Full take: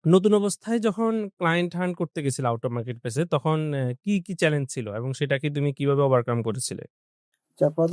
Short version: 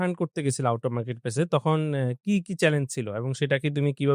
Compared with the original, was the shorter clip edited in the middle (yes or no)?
no